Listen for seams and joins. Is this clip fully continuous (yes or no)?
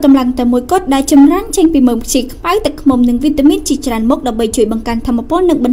yes